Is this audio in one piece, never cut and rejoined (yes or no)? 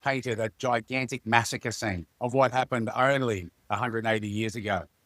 no